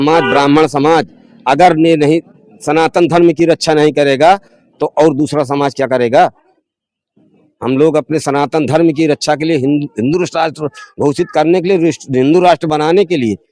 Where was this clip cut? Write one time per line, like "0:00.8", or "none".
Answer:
none